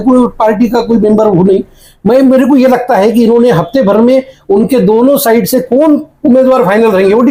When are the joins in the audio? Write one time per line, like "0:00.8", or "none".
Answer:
none